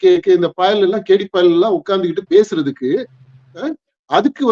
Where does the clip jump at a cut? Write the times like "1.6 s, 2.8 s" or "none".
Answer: none